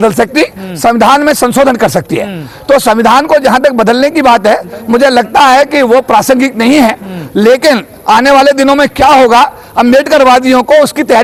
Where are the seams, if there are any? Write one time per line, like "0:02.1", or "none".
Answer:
none